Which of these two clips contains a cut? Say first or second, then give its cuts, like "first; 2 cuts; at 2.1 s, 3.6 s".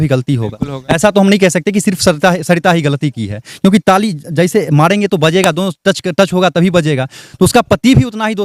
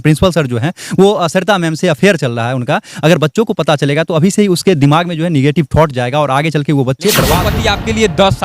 second; 1 cut; at 7.4 s